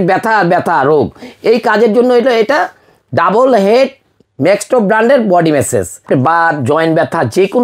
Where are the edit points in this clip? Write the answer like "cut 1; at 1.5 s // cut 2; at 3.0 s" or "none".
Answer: cut 1; at 6.0 s

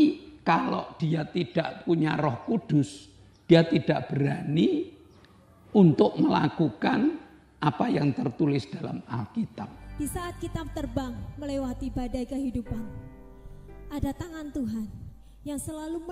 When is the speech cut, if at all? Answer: cut 1; at 9.8 s

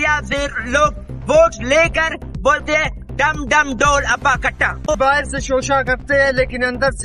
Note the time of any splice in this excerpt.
cut 1; at 4.8 s

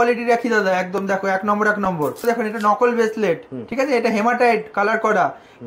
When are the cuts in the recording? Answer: cut 1; at 2.2 s

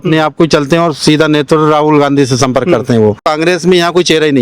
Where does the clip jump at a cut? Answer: cut 1; at 3.2 s

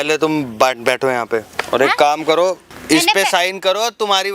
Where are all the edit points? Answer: cut 1; at 1.6 s // cut 2; at 2.7 s

